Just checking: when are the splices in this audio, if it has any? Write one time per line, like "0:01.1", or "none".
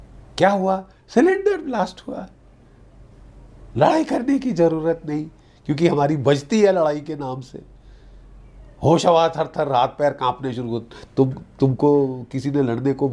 none